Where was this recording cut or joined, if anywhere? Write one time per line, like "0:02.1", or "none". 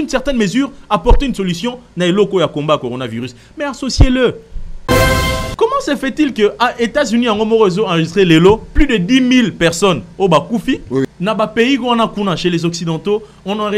0:05.0
0:11.0